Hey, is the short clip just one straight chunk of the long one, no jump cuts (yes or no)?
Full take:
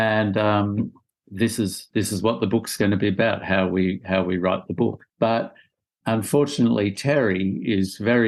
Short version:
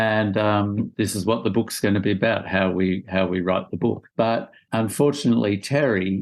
no